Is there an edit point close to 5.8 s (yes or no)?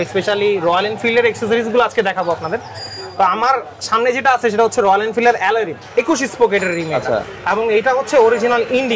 yes